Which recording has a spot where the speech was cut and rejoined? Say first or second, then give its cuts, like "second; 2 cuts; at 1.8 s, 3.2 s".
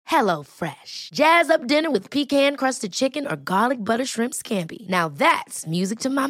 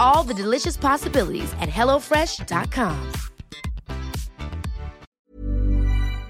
second; 1 cut; at 5.2 s